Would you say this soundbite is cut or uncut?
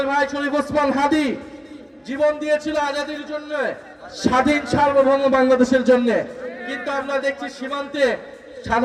uncut